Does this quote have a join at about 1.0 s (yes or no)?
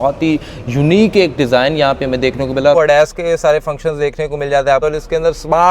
no